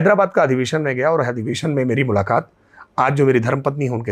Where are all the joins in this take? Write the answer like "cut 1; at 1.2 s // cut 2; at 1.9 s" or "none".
none